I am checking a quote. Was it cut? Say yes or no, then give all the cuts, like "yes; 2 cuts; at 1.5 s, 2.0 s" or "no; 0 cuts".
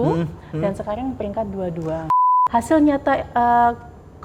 yes; 1 cut; at 2.2 s